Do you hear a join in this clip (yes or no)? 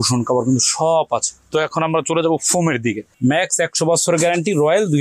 yes